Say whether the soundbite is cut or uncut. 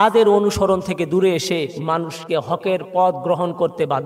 cut